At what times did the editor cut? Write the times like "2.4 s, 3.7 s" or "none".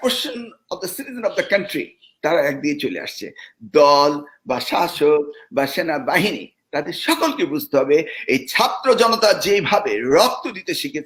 none